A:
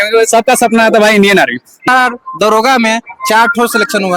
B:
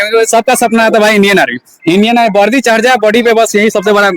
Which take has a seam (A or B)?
A